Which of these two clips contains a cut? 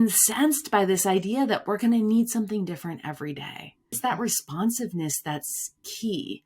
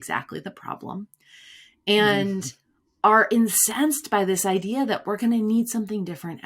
first; 1 cut; at 4.0 s

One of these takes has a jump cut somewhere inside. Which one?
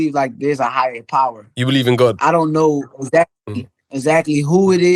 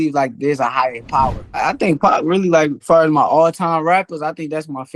second; 2 cuts; at 1.6 s, 2.8 s

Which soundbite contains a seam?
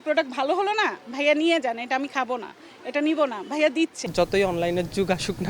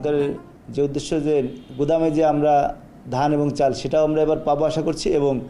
first; 1 cut; at 4.0 s

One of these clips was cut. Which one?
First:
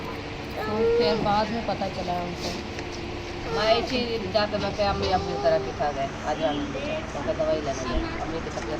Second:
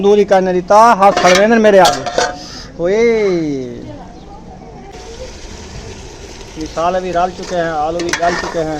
second; 1 cut; at 4.9 s

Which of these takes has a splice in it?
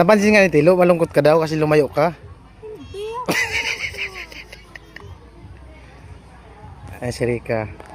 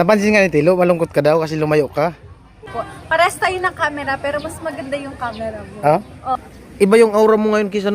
second; 2 cuts; at 2.7 s, 6.4 s

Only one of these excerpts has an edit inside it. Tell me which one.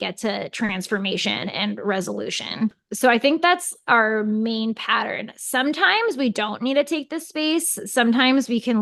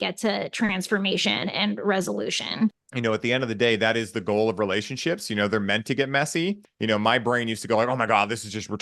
second; 2 cuts; at 2.9 s, 6.7 s

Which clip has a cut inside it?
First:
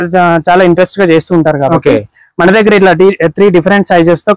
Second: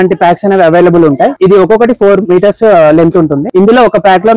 second; 2 cuts; at 1.4 s, 3.5 s

